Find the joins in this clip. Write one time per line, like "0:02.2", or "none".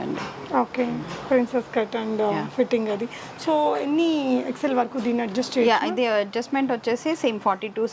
none